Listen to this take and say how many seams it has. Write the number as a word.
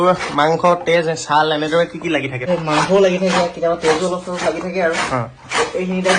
one